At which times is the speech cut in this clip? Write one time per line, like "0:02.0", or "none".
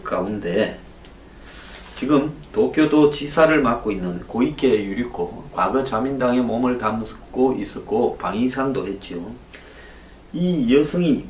0:04.8